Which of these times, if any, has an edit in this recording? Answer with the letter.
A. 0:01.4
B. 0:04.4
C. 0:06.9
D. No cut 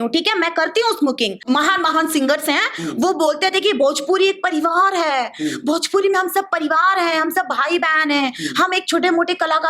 A